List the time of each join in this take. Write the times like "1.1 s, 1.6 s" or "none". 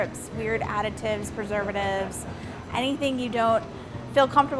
none